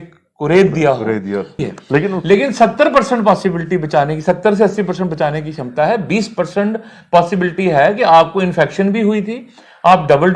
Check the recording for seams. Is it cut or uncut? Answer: cut